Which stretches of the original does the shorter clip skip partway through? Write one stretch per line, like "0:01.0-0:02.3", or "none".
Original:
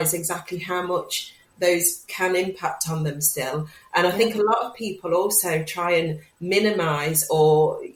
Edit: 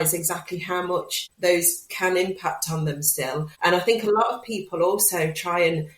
0:01.2-0:01.4
0:03.7-0:03.8